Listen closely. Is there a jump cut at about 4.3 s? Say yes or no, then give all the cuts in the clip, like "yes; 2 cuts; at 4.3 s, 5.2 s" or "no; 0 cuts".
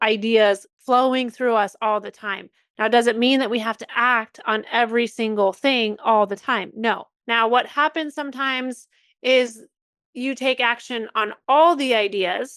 no; 1 cut; at 7.1 s